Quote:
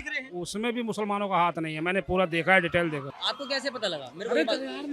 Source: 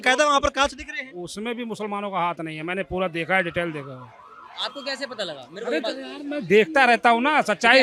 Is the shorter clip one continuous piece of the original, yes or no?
no